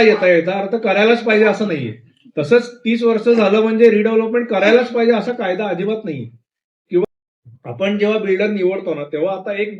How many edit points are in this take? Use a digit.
1